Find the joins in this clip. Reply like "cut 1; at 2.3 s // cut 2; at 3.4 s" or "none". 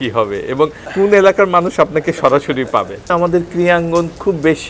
cut 1; at 0.8 s // cut 2; at 3.0 s